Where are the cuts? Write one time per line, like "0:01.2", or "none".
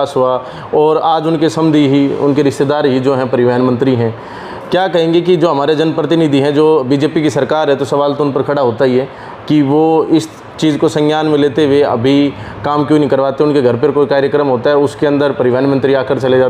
none